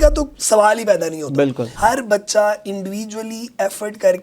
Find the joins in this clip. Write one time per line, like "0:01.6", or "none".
0:01.7